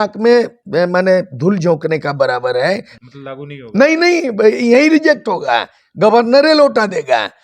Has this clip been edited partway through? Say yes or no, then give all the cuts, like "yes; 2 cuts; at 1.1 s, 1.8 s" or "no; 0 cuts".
yes; 1 cut; at 2.9 s